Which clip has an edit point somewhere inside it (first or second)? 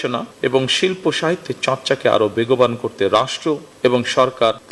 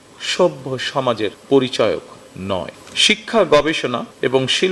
second